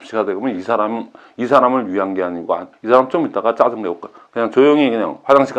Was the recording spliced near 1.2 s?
no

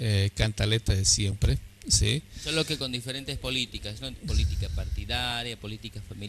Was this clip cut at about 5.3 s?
no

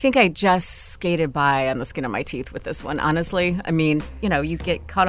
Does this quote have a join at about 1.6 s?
no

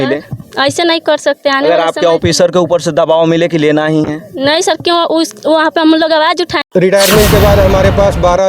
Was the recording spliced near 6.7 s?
yes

